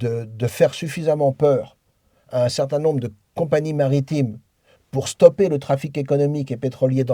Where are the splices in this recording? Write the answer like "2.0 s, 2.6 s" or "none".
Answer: none